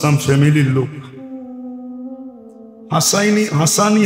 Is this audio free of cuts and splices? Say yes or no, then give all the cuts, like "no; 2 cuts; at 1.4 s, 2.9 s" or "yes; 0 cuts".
no; 2 cuts; at 1.2 s, 2.8 s